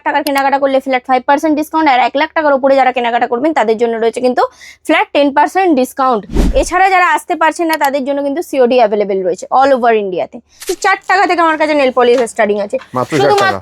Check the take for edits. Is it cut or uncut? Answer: cut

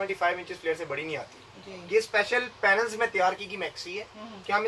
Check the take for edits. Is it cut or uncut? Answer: uncut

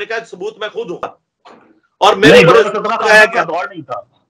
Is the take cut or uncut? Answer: cut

